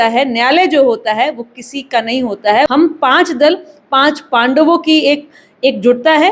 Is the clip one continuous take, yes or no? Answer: no